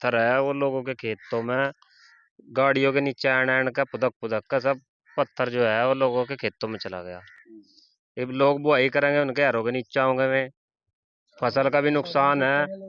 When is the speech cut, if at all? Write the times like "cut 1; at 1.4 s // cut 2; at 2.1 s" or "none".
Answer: none